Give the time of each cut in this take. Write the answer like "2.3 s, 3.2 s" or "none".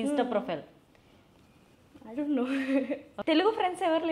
3.1 s